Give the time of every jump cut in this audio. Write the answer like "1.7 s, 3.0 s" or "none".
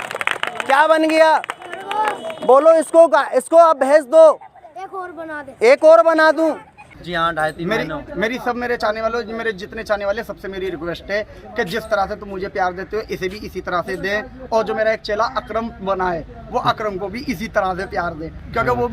6.7 s